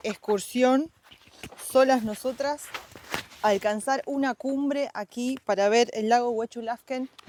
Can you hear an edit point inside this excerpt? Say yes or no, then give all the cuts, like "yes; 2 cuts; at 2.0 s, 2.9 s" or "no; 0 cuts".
no; 0 cuts